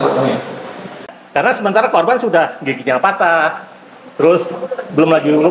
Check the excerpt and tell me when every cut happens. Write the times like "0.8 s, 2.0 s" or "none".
1.2 s